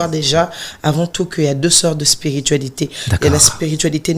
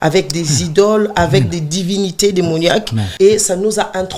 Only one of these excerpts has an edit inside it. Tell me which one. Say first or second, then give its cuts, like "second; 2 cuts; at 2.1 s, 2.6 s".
second; 1 cut; at 3.0 s